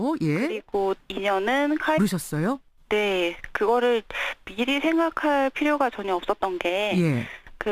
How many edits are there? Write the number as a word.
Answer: zero